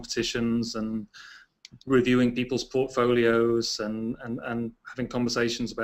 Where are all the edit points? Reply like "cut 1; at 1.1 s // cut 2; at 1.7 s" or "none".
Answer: none